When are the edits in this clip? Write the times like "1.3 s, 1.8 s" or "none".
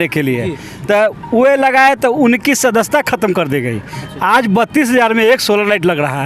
none

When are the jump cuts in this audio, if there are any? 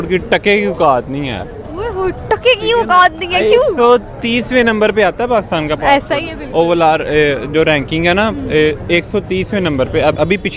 none

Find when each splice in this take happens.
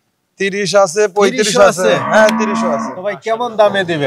3.2 s

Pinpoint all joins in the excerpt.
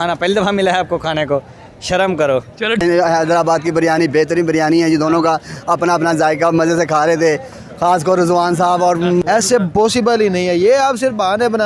2.8 s, 9.2 s

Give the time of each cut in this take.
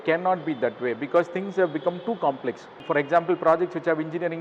2.8 s

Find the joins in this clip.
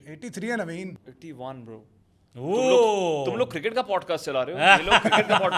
1.1 s

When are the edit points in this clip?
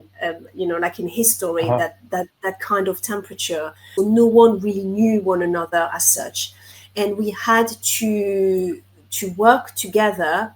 3.9 s

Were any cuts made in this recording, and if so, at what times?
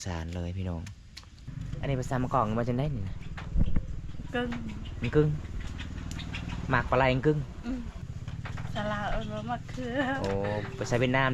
1.5 s, 7.9 s

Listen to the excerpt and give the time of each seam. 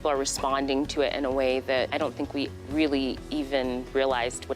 1.9 s

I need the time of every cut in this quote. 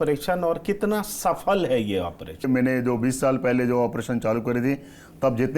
2.5 s

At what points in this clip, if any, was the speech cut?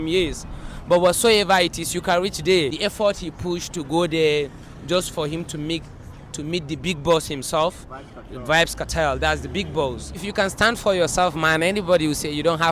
2.8 s, 10.2 s

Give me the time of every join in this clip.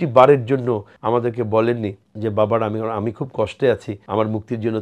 0.9 s, 2.0 s, 3.9 s

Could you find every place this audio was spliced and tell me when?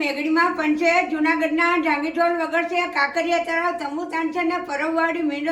none

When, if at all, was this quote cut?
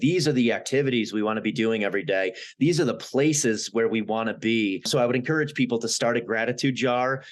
4.9 s

